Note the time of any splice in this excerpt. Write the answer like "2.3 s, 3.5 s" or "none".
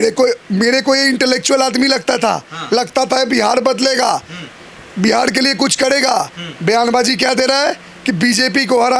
none